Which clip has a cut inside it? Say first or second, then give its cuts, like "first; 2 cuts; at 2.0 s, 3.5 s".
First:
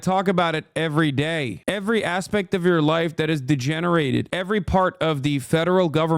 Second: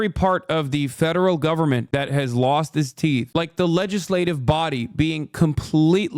first; 1 cut; at 1.6 s